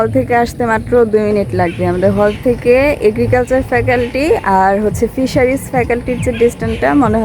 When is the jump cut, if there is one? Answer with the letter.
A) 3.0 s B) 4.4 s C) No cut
C